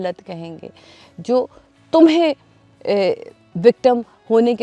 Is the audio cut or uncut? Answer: uncut